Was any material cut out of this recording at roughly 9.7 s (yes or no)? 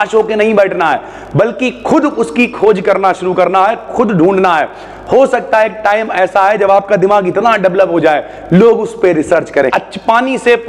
yes